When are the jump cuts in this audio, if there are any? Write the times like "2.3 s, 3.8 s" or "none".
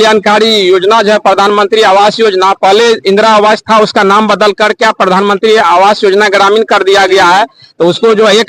none